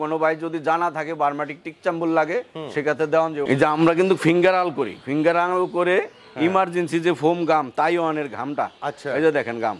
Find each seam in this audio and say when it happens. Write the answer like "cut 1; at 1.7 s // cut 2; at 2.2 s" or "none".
cut 1; at 3.5 s